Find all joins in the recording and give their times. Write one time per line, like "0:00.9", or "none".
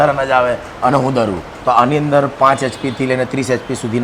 0:01.5